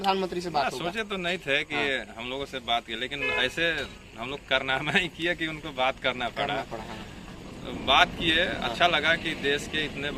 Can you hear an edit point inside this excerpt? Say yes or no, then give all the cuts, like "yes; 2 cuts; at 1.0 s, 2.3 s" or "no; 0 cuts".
no; 0 cuts